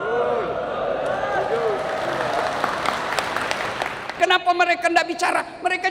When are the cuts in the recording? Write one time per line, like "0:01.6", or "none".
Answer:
0:04.0